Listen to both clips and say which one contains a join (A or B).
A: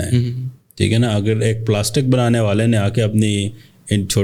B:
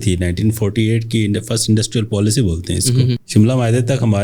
B